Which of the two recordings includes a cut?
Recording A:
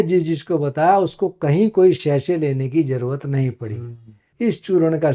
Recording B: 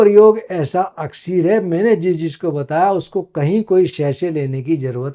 A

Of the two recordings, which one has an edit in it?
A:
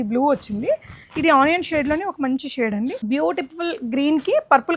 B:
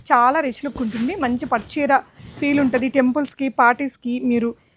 A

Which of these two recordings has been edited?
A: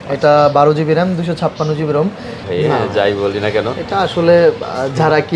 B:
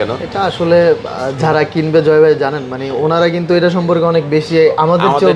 A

